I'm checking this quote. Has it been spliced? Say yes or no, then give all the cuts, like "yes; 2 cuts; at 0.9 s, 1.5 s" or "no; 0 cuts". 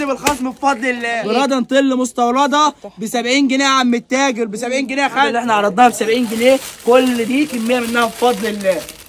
yes; 2 cuts; at 1.1 s, 5.4 s